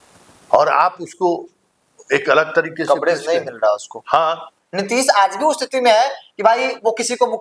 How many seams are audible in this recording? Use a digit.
1